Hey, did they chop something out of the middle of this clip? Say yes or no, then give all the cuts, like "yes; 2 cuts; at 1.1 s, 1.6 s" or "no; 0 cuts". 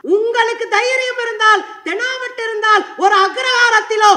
no; 0 cuts